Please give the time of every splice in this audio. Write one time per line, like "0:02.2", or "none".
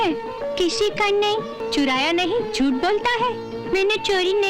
0:01.6